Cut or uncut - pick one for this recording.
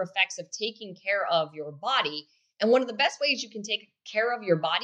uncut